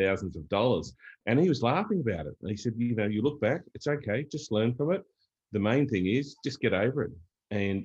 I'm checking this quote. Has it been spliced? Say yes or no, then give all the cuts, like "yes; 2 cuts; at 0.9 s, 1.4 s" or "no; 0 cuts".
no; 0 cuts